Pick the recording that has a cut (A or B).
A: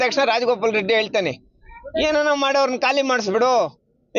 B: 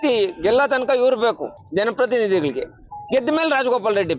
B